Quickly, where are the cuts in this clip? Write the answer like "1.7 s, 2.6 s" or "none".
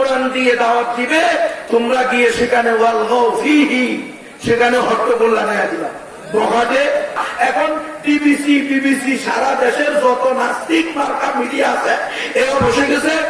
7.2 s